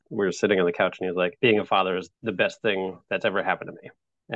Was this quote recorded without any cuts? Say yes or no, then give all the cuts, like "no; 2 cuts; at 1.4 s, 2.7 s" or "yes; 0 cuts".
no; 2 cuts; at 1.3 s, 2.1 s